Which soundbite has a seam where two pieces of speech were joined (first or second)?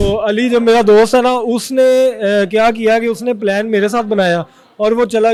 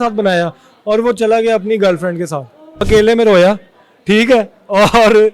second